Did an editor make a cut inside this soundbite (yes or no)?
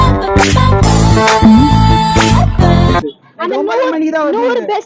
no